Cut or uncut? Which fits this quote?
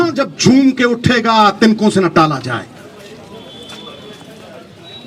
uncut